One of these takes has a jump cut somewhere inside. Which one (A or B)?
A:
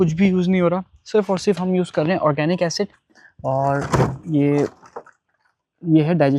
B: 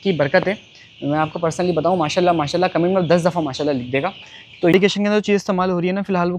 B